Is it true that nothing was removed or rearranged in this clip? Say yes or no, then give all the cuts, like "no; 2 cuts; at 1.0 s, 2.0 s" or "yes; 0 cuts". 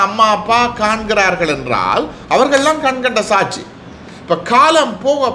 yes; 0 cuts